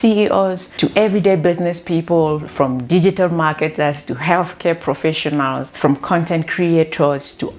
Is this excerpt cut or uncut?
cut